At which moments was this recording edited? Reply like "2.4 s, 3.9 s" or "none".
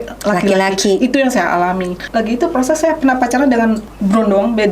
2.0 s, 3.9 s